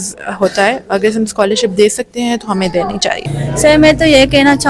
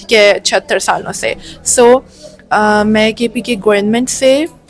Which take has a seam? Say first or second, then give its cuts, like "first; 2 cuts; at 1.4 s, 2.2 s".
first; 1 cut; at 3.3 s